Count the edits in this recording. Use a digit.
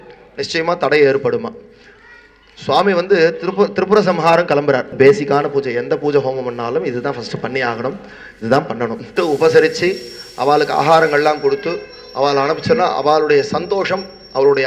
2